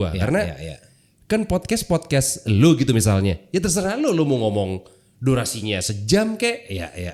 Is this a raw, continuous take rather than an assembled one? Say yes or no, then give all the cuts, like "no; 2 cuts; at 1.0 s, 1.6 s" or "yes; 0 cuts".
yes; 0 cuts